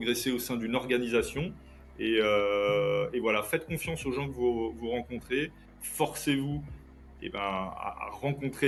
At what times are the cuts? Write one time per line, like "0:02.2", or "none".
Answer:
none